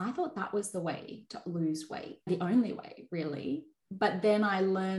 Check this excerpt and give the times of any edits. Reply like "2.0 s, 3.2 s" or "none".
2.3 s